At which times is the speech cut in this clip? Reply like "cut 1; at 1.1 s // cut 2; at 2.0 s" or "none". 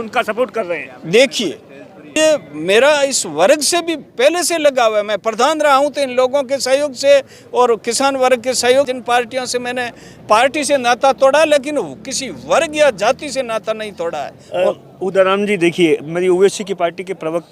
cut 1; at 2.2 s // cut 2; at 8.9 s

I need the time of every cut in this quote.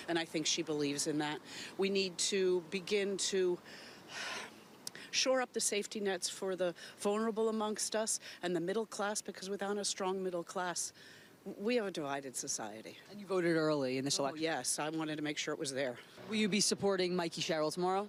none

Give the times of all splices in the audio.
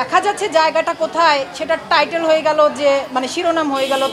none

